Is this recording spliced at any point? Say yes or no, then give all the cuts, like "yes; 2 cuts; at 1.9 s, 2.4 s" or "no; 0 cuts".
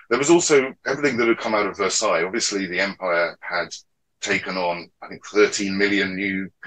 no; 0 cuts